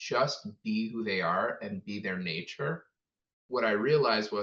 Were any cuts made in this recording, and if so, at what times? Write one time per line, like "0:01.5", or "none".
0:03.4

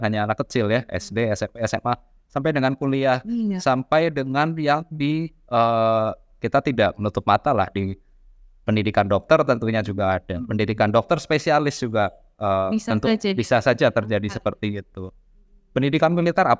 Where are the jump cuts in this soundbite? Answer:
none

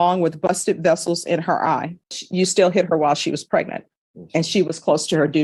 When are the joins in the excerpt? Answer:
0:02.2

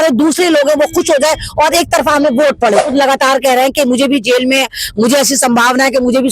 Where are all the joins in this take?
0:02.8

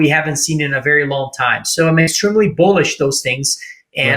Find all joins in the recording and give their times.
none

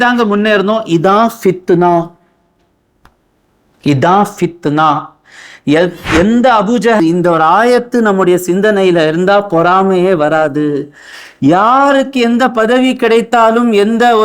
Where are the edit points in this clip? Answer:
0:07.0

